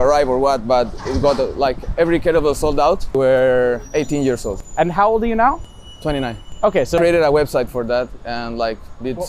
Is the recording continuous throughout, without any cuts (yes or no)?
no